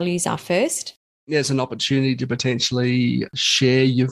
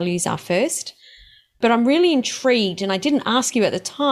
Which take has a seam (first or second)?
first